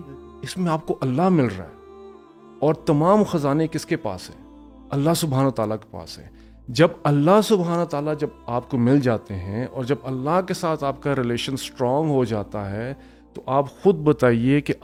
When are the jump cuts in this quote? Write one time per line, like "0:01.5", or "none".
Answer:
none